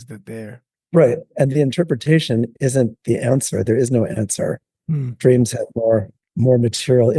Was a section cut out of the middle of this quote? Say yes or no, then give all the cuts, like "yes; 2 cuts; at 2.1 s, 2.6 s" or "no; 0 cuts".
yes; 1 cut; at 6.2 s